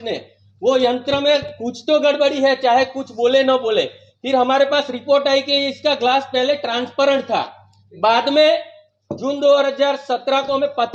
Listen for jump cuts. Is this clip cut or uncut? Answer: uncut